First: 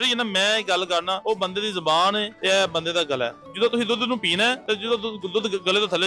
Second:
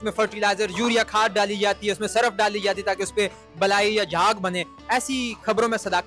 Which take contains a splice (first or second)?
first